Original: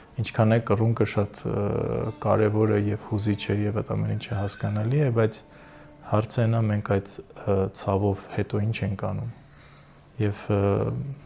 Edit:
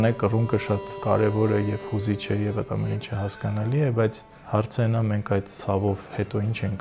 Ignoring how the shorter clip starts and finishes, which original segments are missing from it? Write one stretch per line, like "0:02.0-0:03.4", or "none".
0:01.4-0:02.1
0:05.5-0:05.9
0:07.2-0:07.8

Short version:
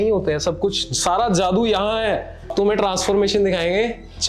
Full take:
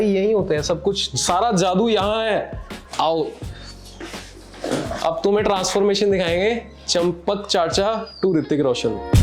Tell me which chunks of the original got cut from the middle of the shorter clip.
0:02.7-0:05.2

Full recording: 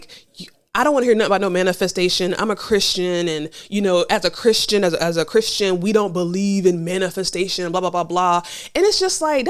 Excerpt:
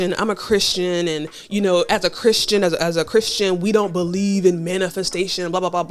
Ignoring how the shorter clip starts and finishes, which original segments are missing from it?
none

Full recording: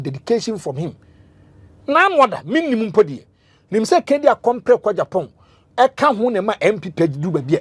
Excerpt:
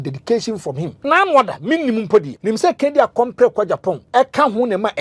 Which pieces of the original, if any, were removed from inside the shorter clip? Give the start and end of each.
0:00.9-0:01.7
0:03.2-0:03.6
0:05.3-0:05.7

